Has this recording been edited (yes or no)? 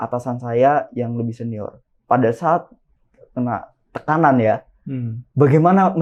no